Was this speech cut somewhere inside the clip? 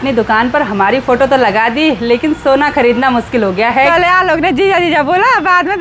yes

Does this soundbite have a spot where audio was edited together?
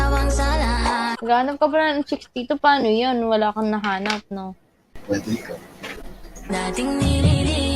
yes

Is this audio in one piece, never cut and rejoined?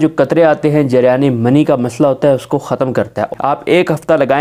no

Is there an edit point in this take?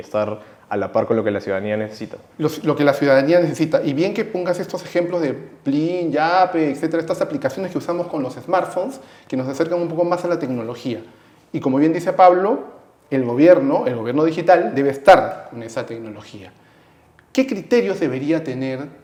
no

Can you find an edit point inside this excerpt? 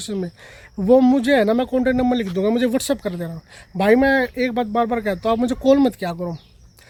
no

